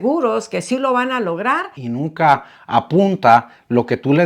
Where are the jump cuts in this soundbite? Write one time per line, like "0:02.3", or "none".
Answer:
0:01.7